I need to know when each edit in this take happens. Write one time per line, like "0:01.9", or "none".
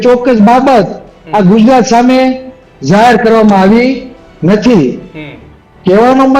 none